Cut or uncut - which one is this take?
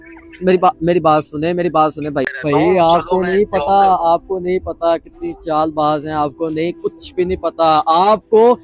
cut